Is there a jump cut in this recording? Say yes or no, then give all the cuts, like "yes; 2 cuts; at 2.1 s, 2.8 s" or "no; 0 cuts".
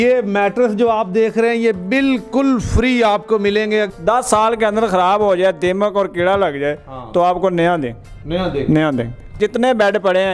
yes; 2 cuts; at 3.9 s, 9.3 s